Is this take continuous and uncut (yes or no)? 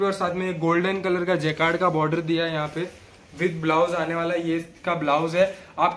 yes